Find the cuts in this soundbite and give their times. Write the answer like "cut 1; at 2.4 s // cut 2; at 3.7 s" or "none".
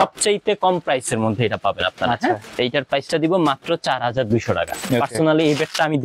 cut 1; at 2.5 s // cut 2; at 4.8 s